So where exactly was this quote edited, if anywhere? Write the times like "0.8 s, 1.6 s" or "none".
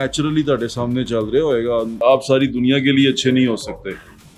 2.0 s